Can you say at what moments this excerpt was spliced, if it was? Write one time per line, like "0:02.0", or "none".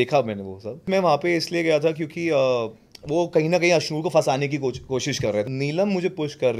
0:00.9
0:05.5